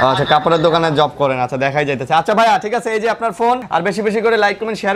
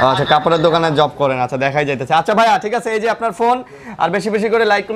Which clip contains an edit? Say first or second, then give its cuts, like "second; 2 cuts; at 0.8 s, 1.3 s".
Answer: first; 1 cut; at 3.6 s